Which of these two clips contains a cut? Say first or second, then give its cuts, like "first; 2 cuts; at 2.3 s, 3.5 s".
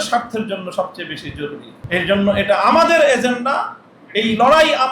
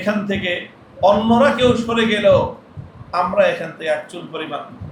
first; 1 cut; at 1.7 s